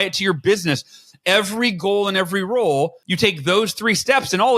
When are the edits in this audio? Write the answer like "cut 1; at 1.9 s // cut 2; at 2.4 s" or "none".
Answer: cut 1; at 3.0 s